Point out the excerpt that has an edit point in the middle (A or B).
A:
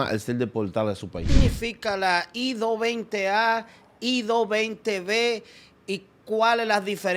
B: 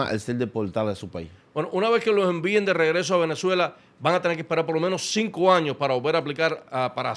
A